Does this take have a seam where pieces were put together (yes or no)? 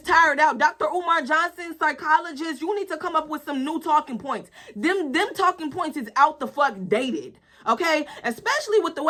no